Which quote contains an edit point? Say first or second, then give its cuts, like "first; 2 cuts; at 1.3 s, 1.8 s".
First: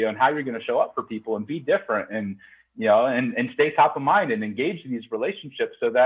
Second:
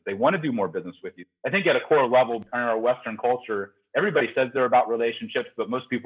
second; 2 cuts; at 1.2 s, 2.5 s